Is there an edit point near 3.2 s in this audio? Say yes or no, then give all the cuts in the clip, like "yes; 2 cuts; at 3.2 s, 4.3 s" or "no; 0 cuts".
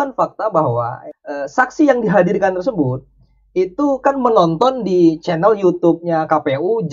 no; 1 cut; at 1.0 s